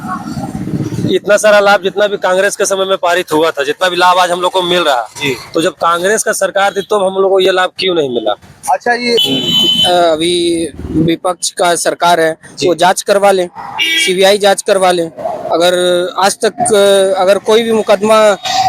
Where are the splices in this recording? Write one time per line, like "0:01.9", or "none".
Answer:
0:09.2